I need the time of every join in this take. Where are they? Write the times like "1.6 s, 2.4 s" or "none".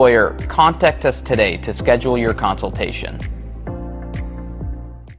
none